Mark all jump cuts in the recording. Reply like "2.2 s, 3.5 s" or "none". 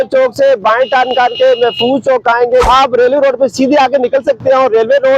2.6 s